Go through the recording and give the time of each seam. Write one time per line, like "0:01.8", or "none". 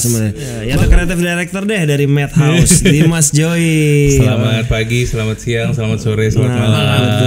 0:01.0